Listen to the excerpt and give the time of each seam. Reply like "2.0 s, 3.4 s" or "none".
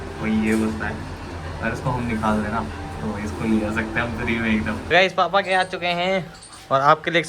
4.9 s